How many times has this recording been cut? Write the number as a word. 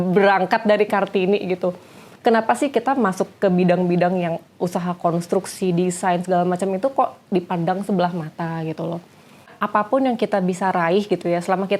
one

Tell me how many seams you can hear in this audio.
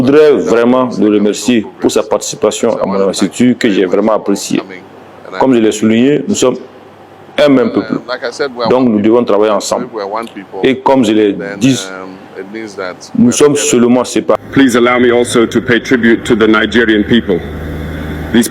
one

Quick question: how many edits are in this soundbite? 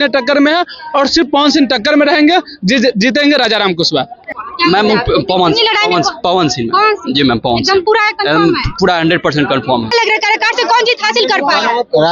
two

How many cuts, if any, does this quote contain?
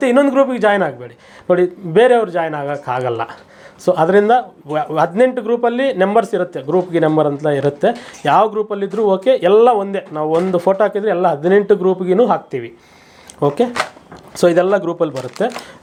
zero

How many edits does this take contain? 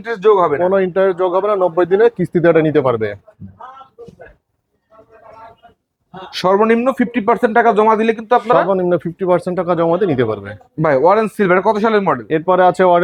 zero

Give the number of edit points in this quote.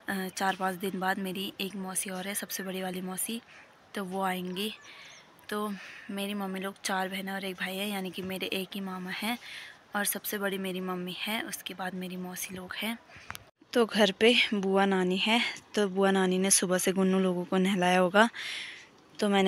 zero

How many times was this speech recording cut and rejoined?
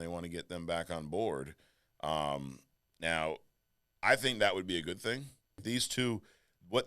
one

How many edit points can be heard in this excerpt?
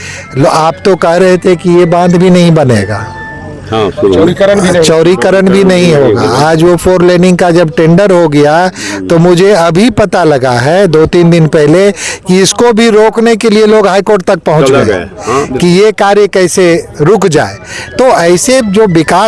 zero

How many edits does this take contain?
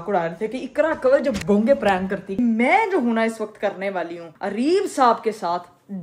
one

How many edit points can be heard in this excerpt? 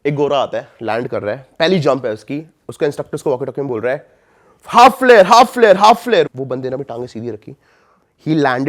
one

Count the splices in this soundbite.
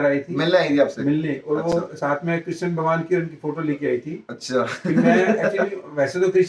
zero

